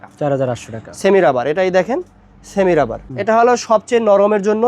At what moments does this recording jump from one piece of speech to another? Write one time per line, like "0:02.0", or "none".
0:03.1